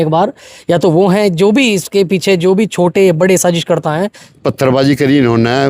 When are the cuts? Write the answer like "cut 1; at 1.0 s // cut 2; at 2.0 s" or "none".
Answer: cut 1; at 4.3 s